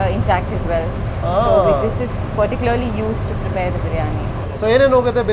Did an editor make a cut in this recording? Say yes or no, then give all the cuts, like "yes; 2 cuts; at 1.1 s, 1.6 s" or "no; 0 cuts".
no; 0 cuts